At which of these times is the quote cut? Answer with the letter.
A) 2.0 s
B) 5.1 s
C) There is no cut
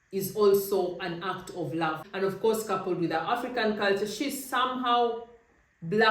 A